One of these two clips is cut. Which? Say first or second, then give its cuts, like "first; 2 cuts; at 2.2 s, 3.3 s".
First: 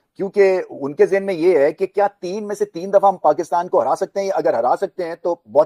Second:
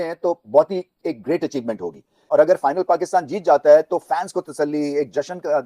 second; 1 cut; at 2.1 s